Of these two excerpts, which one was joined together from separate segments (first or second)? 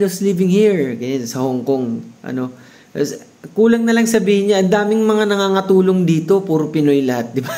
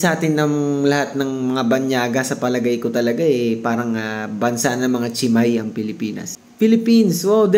second